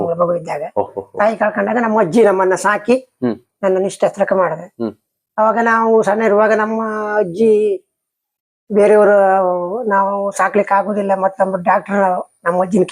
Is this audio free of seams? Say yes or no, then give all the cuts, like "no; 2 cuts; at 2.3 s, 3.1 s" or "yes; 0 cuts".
yes; 0 cuts